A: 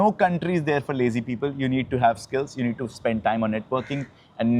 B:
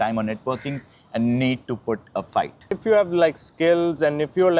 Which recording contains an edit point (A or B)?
B